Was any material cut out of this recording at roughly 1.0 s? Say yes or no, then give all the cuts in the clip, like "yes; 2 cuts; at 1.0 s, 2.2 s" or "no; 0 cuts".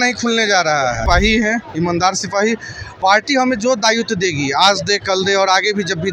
yes; 1 cut; at 1.0 s